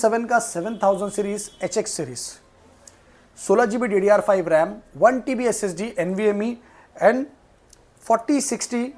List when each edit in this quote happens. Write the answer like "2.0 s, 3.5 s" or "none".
none